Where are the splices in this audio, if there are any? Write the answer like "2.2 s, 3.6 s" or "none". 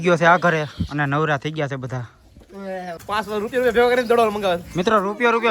2.9 s